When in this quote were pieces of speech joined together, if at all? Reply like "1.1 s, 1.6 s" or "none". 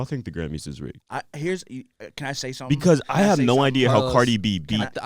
1.0 s

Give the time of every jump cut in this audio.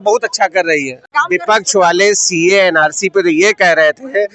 1.1 s

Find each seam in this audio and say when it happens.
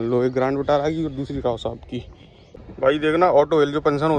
2.7 s

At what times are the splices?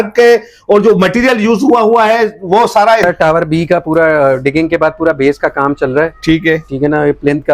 3.0 s

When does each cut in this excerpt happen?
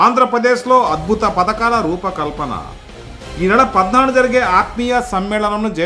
none

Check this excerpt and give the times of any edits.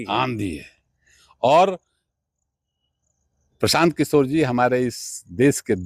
none

